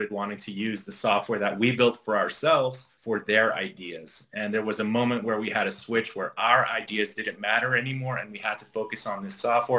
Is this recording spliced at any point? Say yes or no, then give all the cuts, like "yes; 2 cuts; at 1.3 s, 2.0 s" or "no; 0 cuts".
yes; 1 cut; at 2.9 s